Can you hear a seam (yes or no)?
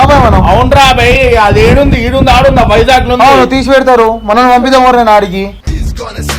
no